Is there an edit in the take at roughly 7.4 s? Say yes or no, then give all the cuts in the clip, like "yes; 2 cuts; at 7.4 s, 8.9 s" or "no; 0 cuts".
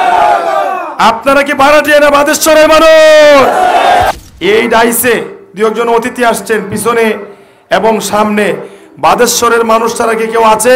no; 1 cut; at 4.1 s